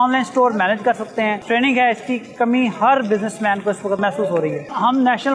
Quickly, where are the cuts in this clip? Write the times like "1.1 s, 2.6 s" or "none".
none